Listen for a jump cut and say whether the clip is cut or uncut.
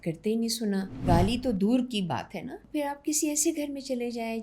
cut